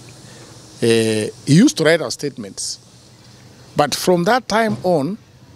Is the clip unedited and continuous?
yes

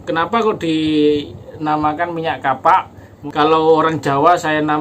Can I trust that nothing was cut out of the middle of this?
no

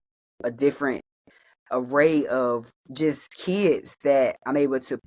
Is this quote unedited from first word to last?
yes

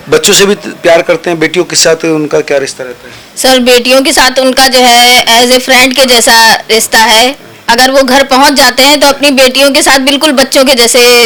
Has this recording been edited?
no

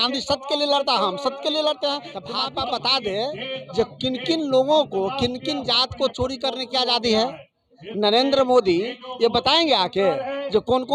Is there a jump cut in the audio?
yes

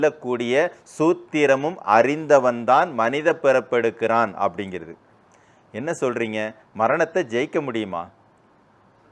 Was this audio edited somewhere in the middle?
no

